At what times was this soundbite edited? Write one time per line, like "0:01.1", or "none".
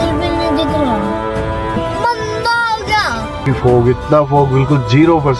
0:01.8
0:03.4